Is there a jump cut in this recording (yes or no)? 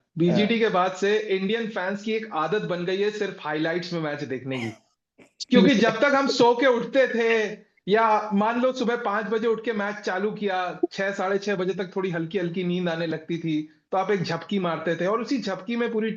no